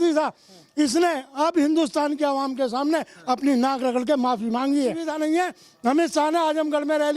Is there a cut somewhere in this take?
yes; 1 cut; at 5.1 s

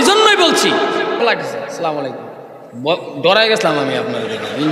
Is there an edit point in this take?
yes; 1 cut; at 1.2 s

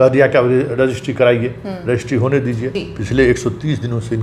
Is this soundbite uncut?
no; 1 cut; at 2.9 s

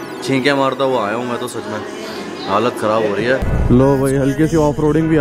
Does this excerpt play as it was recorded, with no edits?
no; 1 cut; at 3.5 s

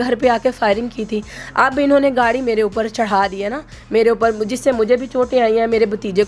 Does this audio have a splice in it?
no; 0 cuts

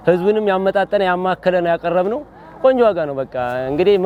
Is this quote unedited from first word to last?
yes; 0 cuts

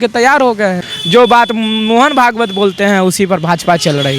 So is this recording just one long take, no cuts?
no; 1 cut; at 0.9 s

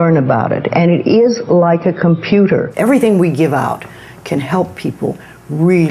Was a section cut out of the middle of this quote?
yes; 1 cut; at 2.7 s

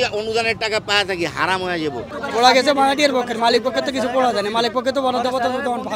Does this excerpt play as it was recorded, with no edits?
no; 1 cut; at 2.1 s

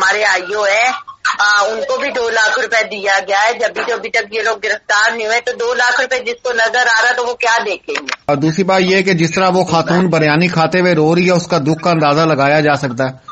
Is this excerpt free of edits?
no; 1 cut; at 8.3 s

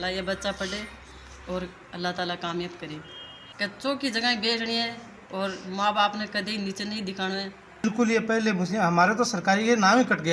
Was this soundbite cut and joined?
yes; 2 cuts; at 3.8 s, 7.8 s

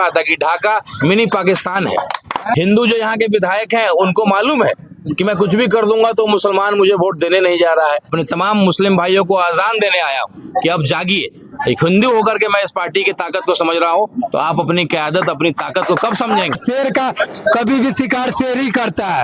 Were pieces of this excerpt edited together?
yes; 3 cuts; at 2.6 s, 8.1 s, 16.6 s

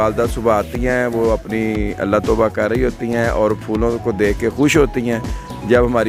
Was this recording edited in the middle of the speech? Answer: no; 0 cuts

